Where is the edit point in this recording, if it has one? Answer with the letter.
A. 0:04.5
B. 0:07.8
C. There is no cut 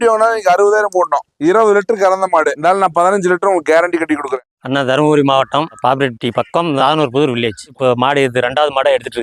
A